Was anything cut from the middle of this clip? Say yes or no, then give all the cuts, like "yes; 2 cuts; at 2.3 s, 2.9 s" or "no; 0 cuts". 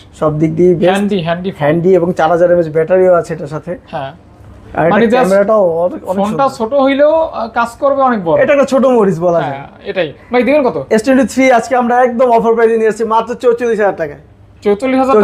no; 0 cuts